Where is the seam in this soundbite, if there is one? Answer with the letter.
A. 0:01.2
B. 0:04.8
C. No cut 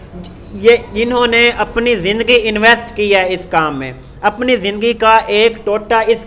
C